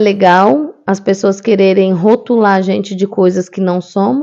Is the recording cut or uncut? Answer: uncut